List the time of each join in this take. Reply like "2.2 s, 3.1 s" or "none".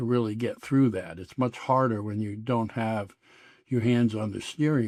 none